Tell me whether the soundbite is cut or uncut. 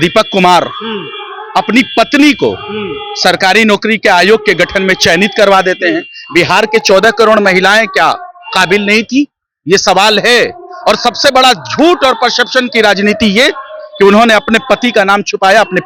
uncut